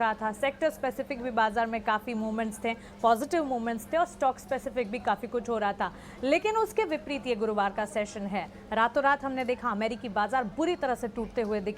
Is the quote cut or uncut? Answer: uncut